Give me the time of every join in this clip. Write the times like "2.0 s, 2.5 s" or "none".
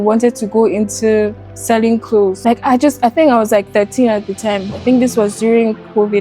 2.4 s